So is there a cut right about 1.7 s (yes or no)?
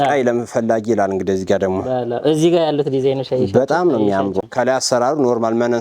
no